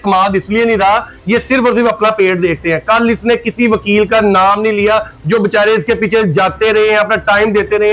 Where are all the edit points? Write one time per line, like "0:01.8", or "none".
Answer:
none